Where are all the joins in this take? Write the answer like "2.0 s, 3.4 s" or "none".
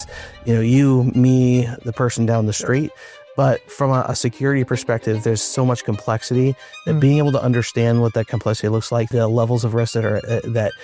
9.1 s